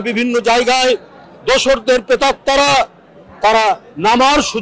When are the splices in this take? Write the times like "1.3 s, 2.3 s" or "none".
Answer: none